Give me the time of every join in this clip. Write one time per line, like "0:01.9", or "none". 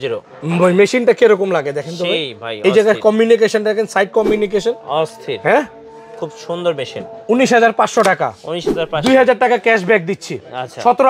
none